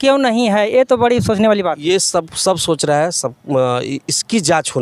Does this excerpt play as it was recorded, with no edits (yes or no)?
yes